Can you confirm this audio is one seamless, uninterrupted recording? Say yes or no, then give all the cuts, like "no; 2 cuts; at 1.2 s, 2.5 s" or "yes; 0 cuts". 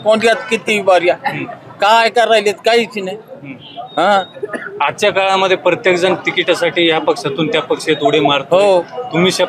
yes; 0 cuts